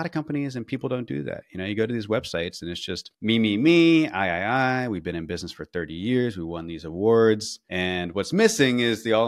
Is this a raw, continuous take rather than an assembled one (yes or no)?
yes